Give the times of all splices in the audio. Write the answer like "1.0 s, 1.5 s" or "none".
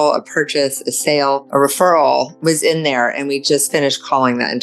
1.5 s, 2.3 s